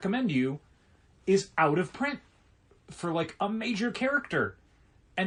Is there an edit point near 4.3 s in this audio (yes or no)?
no